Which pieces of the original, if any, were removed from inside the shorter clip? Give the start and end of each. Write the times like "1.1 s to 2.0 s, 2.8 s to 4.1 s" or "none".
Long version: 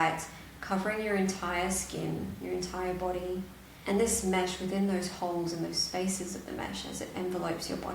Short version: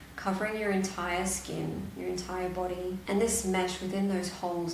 3.5 s to 3.8 s